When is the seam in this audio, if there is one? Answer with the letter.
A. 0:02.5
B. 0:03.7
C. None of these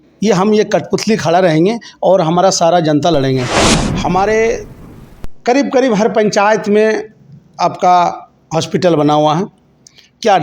B